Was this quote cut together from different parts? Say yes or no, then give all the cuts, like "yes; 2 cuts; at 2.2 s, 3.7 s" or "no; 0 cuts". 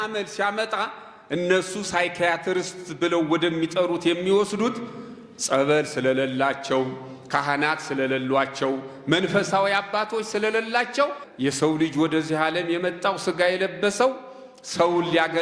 yes; 1 cut; at 11.2 s